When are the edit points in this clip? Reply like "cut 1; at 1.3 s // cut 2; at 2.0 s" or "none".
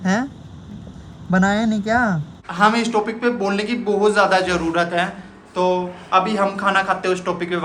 cut 1; at 2.4 s